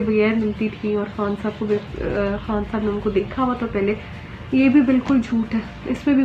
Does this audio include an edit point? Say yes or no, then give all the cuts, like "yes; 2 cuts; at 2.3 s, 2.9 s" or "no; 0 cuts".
no; 0 cuts